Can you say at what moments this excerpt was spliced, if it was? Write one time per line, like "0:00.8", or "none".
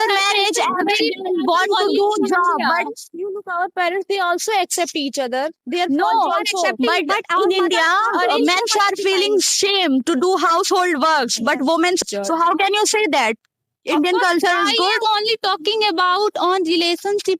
0:12.0

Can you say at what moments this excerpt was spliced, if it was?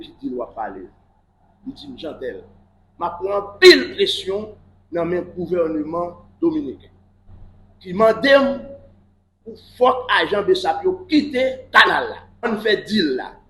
0:12.5

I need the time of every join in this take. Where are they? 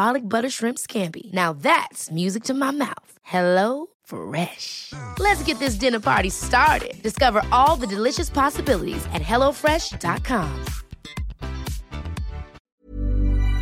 0:12.6

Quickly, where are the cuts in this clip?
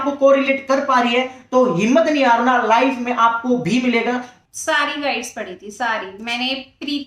0:04.3

